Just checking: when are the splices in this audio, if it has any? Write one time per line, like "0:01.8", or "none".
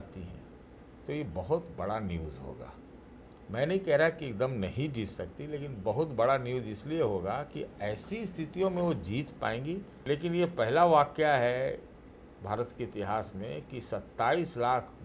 0:09.9